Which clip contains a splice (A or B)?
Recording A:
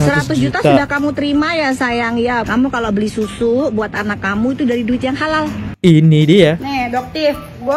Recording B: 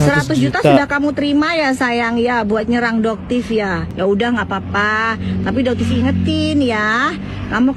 A